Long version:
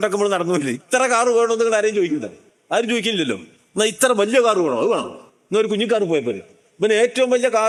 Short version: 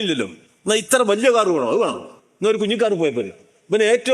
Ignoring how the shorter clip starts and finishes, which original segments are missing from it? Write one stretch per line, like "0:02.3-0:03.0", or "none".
none

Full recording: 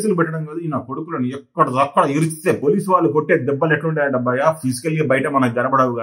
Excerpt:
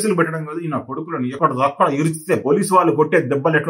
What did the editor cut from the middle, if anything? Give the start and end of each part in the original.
0:01.3-0:01.5

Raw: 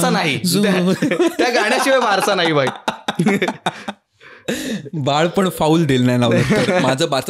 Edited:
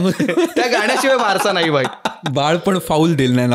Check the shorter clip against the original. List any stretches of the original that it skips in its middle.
0:03.0-0:04.9

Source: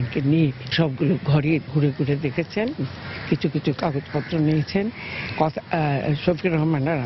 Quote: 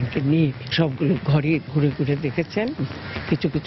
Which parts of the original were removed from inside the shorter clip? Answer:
none

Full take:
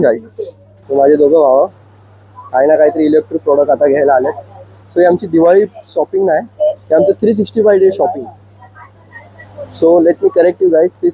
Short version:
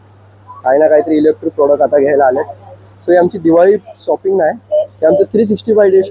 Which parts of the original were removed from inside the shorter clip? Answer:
none

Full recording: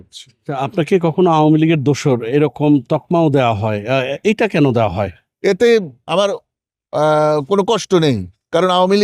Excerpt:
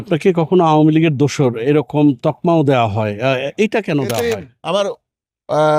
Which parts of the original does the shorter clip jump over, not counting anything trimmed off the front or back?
0:05.1-0:05.9

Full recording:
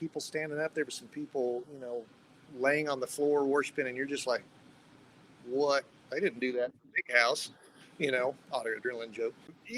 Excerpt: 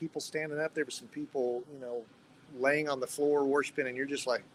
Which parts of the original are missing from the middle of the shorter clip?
none

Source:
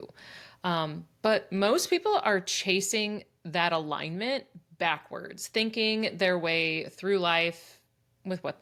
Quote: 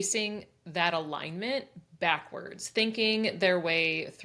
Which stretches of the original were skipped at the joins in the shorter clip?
none

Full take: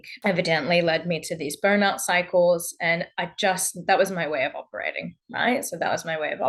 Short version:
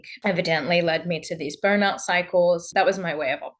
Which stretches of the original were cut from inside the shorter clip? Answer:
0:02.7-0:03.8

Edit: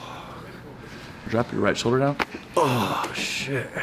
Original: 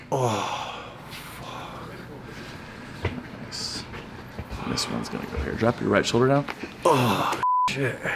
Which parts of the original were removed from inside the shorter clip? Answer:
0:02.7-0:05.6

